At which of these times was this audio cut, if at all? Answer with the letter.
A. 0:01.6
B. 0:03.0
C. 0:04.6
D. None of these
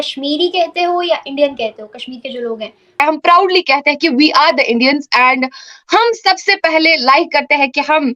B